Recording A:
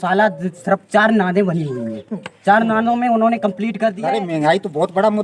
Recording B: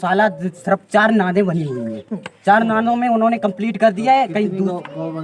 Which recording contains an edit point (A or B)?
A